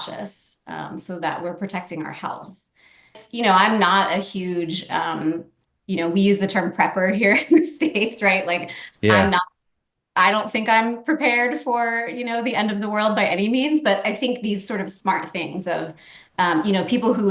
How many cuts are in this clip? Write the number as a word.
one